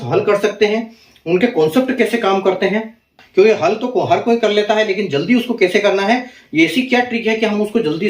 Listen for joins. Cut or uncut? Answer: cut